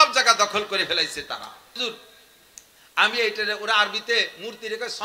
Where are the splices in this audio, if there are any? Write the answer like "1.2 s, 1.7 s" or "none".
1.8 s